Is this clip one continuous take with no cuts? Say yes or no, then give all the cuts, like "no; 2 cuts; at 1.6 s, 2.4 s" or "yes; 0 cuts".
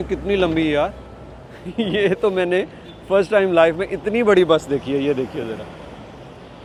yes; 0 cuts